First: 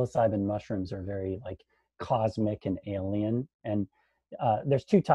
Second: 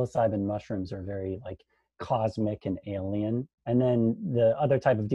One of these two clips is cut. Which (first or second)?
second